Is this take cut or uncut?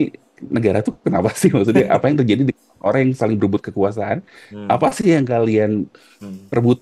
uncut